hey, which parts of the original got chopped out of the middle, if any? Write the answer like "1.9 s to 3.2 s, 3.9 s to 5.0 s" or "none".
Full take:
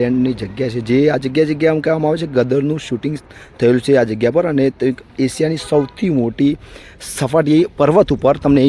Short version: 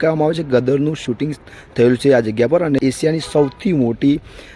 4.6 s to 5.1 s